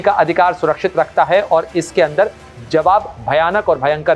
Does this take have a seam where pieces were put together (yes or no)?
no